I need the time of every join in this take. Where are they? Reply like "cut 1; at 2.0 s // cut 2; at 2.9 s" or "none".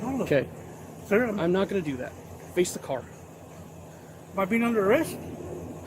none

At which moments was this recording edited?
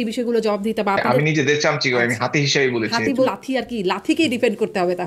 cut 1; at 1.1 s // cut 2; at 3.3 s

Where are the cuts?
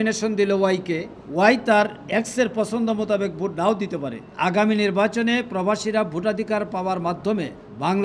cut 1; at 4.2 s

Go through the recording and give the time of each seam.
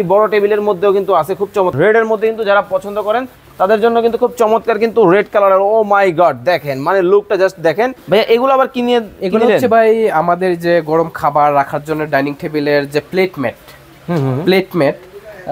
cut 1; at 1.7 s // cut 2; at 8.0 s

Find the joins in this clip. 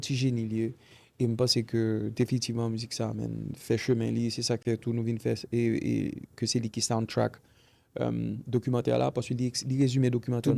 none

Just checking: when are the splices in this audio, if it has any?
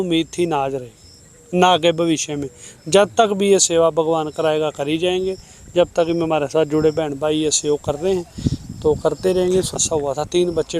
cut 1; at 9.8 s

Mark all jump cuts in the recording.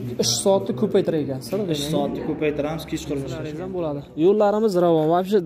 cut 1; at 3.6 s

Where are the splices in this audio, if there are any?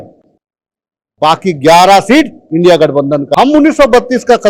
cut 1; at 3.3 s

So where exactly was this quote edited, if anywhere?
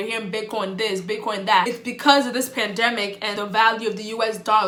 none

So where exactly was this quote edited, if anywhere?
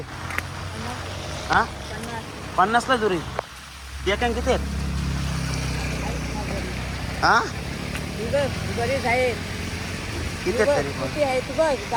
none

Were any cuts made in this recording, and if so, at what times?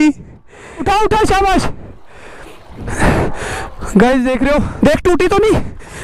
cut 1; at 0.8 s // cut 2; at 4.7 s

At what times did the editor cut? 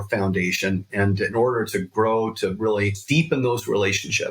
cut 1; at 3.0 s

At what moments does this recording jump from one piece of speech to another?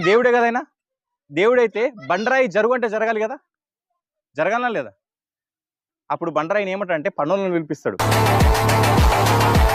none

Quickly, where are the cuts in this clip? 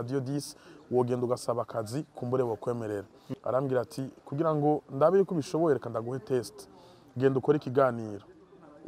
cut 1; at 3.2 s

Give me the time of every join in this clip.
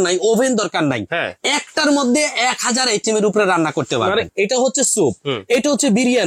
cut 1; at 4.3 s

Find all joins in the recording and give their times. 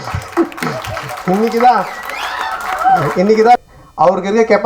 cut 1; at 3.6 s

